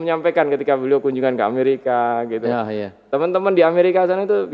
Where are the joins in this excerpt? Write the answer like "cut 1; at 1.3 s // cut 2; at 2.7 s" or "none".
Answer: none